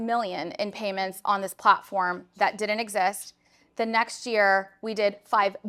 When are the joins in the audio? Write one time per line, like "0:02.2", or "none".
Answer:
none